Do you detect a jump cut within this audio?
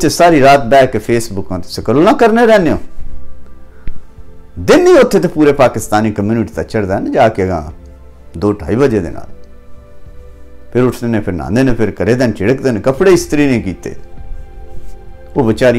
no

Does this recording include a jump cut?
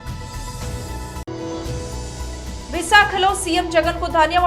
yes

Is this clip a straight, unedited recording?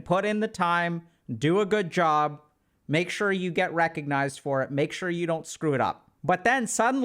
no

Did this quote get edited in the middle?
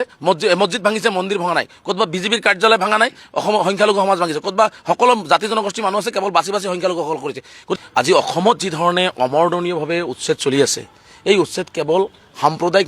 yes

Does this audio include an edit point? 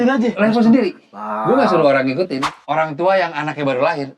yes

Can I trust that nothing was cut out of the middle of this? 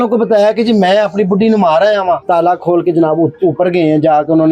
no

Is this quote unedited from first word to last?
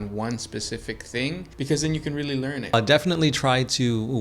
no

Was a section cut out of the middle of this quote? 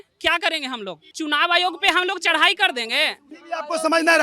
yes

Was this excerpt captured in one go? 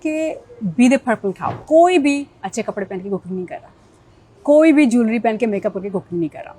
no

